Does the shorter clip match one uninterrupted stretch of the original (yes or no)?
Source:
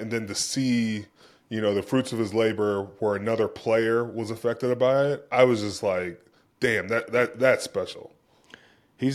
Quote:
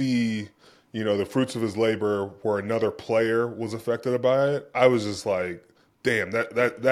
yes